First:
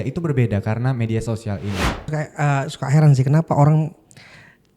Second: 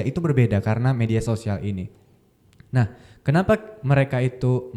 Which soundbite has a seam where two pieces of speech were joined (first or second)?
first